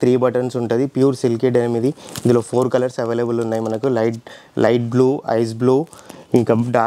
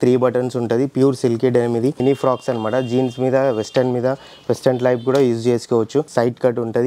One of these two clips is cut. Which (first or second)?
second